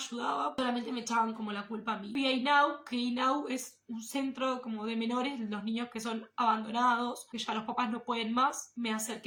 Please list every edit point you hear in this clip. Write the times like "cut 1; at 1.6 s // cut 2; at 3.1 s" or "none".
none